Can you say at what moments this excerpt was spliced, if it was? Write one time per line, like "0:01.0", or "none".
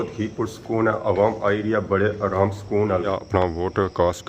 0:03.1